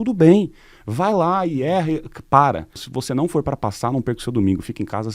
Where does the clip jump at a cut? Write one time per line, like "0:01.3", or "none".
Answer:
0:02.9

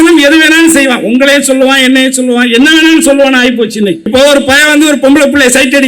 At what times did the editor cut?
0:04.0

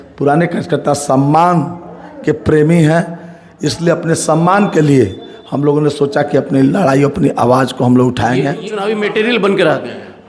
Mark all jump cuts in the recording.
0:08.7

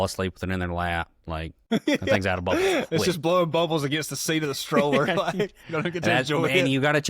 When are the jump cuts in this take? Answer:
0:01.5

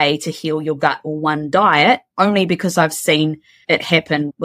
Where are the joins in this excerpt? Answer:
0:03.5

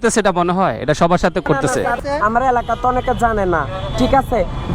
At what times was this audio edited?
none

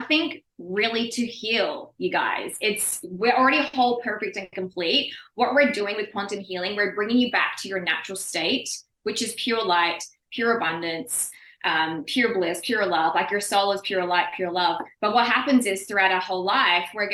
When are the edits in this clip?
none

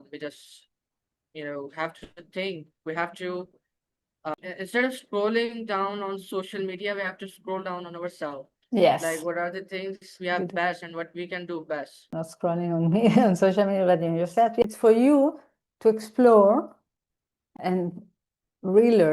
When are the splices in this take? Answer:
0:04.3
0:12.2
0:14.6
0:17.5

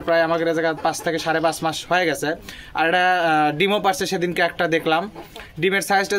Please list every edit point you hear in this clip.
none

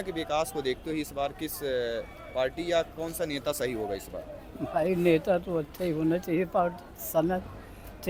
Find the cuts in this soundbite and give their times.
none

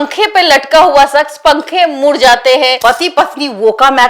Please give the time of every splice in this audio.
0:02.8

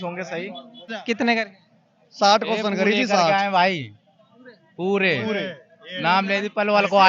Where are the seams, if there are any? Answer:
0:01.0

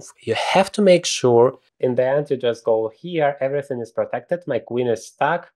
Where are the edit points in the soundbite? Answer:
0:01.7

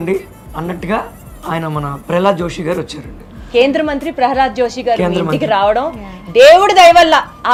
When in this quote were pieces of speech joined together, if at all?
none

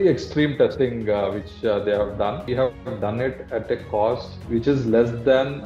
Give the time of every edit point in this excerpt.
0:02.5
0:04.4

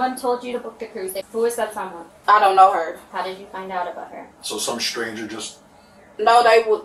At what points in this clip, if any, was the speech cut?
0:01.2

